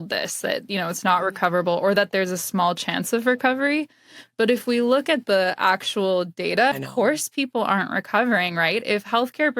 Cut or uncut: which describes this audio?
cut